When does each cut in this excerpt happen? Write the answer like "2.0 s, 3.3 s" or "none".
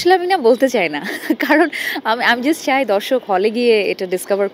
none